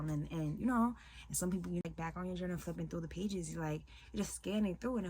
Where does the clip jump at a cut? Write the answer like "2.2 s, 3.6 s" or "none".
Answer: 1.8 s